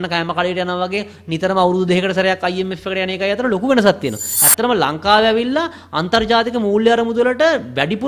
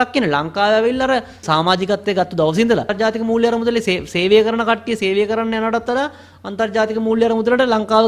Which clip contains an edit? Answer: second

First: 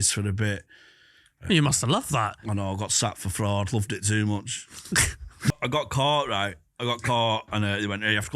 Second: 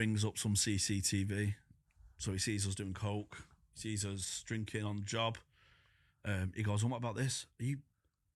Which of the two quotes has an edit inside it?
first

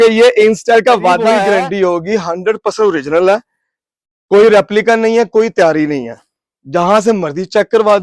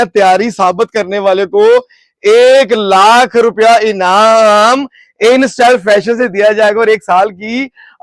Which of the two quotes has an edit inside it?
first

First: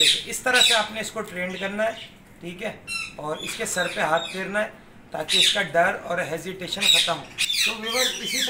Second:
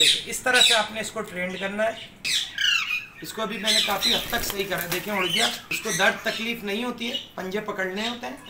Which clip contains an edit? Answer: second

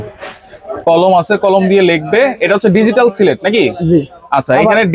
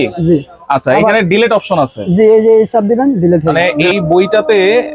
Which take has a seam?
second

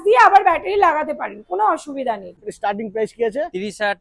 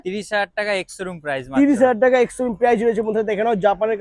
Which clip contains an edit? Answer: first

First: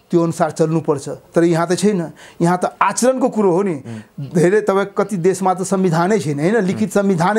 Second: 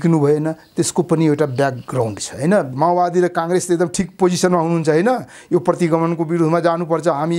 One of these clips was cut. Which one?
second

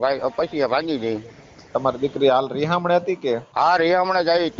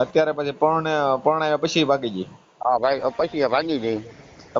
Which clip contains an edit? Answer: first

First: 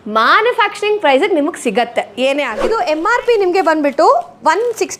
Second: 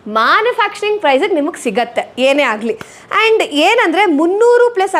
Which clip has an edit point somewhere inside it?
first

